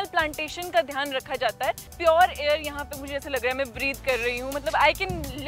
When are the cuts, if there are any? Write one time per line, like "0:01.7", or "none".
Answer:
0:01.9